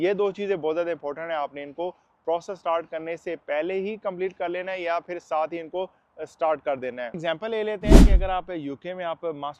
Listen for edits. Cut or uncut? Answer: uncut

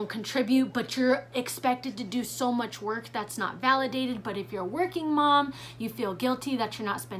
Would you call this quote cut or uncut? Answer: uncut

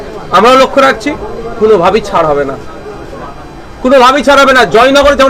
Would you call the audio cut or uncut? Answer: uncut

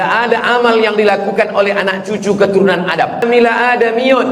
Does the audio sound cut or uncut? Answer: cut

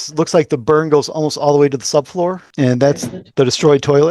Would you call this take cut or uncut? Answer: cut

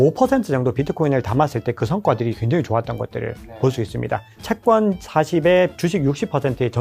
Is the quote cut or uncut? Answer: cut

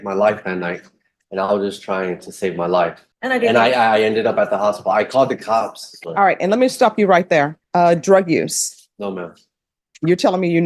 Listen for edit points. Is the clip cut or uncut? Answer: cut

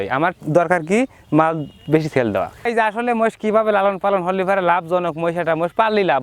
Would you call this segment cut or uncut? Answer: cut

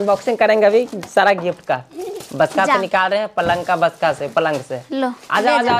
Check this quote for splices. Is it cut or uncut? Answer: uncut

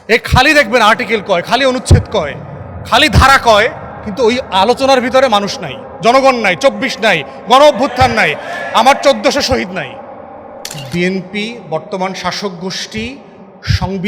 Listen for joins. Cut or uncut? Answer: cut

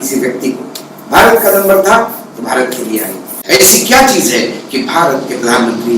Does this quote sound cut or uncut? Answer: cut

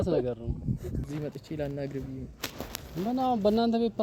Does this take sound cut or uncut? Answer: cut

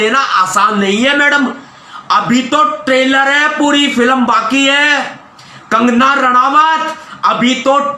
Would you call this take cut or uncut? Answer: uncut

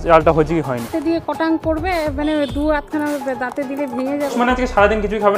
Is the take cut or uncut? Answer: cut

